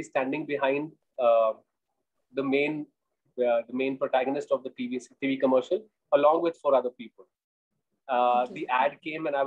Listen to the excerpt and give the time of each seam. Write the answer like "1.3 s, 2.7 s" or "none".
none